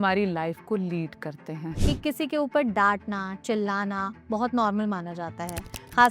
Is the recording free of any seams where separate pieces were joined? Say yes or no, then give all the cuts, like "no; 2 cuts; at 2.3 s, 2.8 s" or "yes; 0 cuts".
no; 1 cut; at 1.7 s